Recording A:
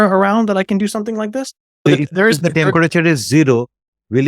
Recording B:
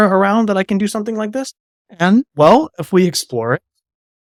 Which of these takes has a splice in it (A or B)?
A